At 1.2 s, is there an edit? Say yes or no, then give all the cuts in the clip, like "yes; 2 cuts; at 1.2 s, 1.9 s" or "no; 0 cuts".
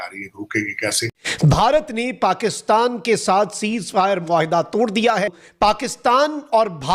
yes; 2 cuts; at 1.2 s, 5.4 s